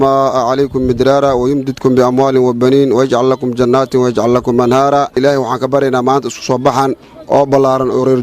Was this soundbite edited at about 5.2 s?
yes; 1 cut; at 5.2 s

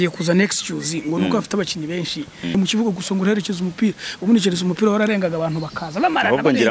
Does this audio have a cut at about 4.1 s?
no; 1 cut; at 2.6 s

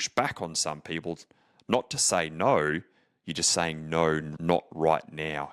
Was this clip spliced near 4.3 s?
yes; 1 cut; at 4.3 s

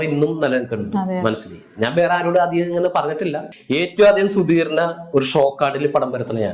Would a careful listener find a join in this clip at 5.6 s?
no; 1 cut; at 3.5 s

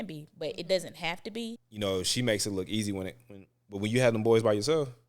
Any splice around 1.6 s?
yes; 1 cut; at 1.6 s

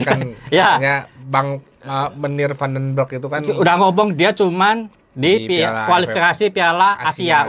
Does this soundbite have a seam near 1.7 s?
no; 0 cuts

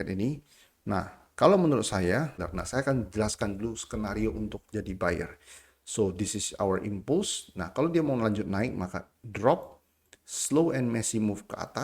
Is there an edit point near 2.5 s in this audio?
yes; 1 cut; at 2.5 s

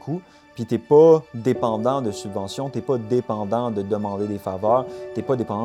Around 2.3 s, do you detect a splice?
no; 0 cuts

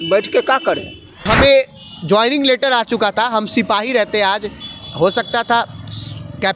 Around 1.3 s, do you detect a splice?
yes; 1 cut; at 1.3 s

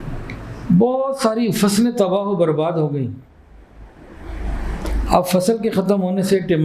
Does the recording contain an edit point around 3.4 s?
no; 0 cuts

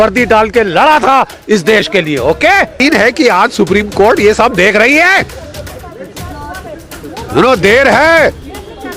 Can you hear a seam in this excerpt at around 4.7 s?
no; 1 cut; at 2.8 s

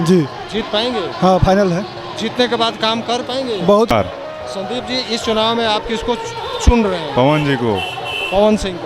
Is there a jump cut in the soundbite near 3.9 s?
yes; 1 cut; at 3.9 s

